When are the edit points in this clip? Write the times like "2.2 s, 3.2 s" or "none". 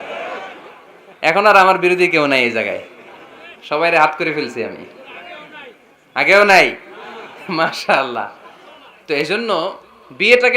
none